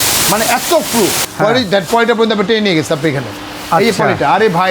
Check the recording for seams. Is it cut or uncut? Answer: cut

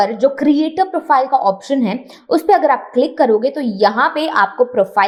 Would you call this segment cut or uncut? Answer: uncut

